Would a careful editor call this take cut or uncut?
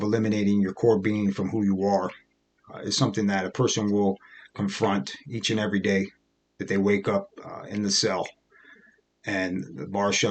uncut